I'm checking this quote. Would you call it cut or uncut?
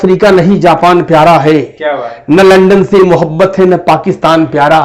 uncut